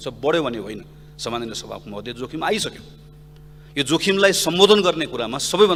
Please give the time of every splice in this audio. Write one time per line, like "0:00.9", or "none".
none